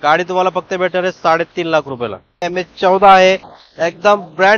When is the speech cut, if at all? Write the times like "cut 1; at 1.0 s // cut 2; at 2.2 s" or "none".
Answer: cut 1; at 2.5 s